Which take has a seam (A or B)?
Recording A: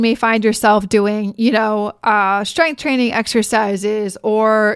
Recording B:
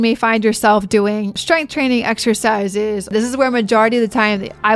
B